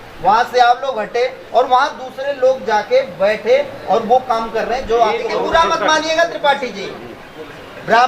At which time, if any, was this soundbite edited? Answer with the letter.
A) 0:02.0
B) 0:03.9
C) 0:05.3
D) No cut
C